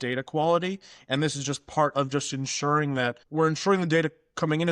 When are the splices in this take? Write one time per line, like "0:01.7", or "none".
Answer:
0:03.2